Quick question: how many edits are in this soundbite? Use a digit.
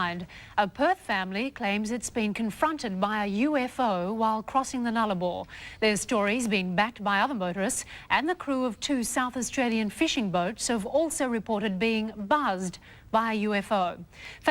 1